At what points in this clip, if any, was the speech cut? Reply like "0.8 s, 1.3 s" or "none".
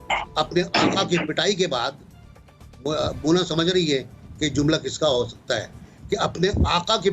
none